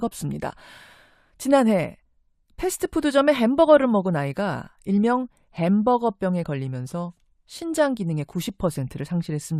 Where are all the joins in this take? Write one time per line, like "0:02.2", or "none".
none